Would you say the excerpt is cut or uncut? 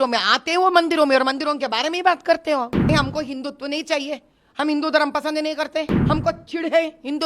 cut